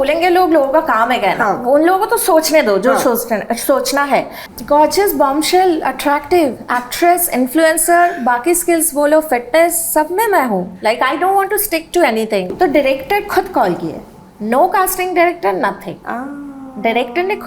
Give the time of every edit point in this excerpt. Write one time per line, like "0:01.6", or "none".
0:04.4
0:12.5